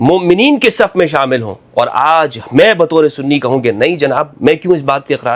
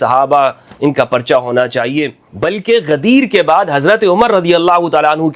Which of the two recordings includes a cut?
second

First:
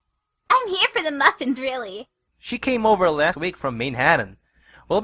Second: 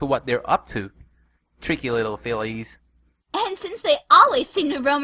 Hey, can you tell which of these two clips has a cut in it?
first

